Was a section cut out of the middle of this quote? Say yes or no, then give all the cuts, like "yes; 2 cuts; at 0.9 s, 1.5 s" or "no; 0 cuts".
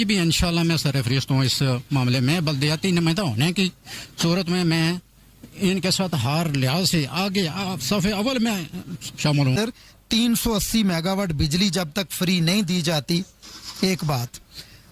yes; 1 cut; at 9.6 s